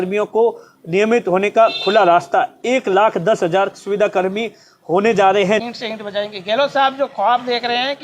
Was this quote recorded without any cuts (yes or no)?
no